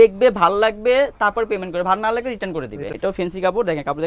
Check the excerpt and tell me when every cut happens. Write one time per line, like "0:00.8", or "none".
0:02.8